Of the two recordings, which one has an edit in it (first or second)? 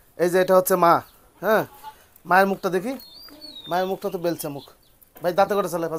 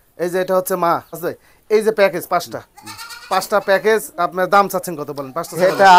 second